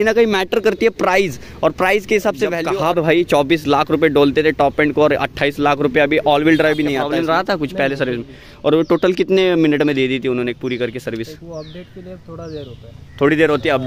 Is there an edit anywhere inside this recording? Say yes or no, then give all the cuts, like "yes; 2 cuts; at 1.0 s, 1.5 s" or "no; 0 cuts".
yes; 2 cuts; at 2.6 s, 7.0 s